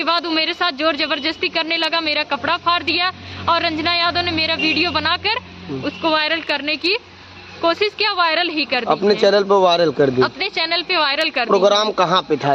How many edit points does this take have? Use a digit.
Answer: 0